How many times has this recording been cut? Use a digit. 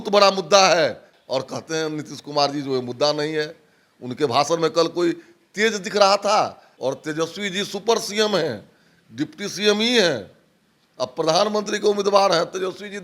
2